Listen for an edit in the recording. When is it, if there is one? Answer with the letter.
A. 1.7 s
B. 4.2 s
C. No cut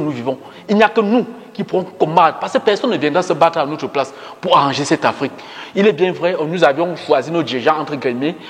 C